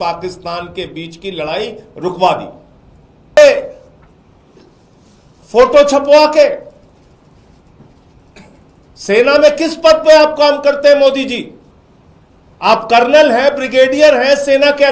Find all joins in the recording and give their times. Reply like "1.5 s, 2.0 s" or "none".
3.4 s